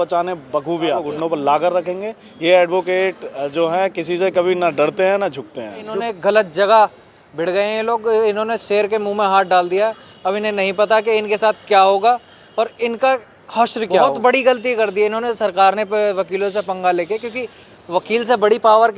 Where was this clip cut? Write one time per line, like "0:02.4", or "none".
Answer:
0:01.1
0:06.0
0:14.1